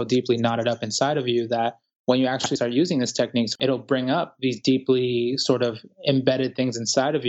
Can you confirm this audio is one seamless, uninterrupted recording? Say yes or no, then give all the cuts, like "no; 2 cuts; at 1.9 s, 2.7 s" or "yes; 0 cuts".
no; 1 cut; at 3.5 s